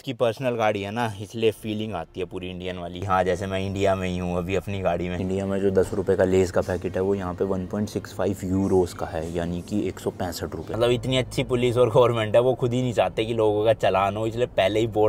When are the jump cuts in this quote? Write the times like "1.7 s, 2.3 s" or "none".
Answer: 5.2 s, 10.7 s